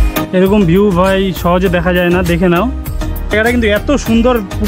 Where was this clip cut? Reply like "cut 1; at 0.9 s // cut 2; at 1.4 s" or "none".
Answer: none